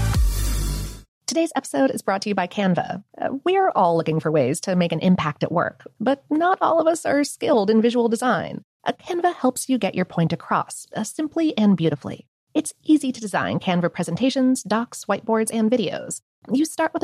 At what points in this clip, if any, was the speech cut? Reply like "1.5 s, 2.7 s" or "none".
1.0 s